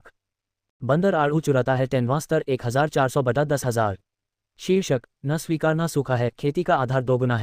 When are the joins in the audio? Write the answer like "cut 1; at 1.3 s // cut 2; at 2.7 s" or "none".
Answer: none